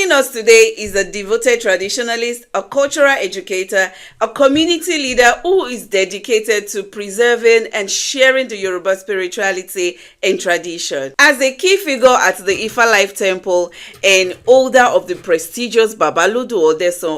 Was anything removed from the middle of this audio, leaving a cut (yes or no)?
no